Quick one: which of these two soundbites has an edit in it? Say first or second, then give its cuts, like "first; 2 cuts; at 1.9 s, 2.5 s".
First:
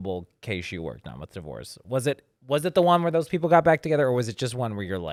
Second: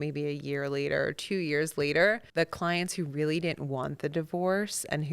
second; 1 cut; at 2.2 s